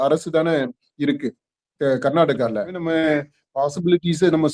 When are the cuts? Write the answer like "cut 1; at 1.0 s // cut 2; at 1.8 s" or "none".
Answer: cut 1; at 2.8 s